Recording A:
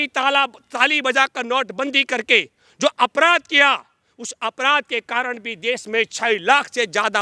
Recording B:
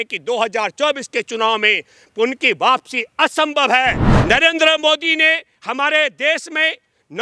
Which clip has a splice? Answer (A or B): B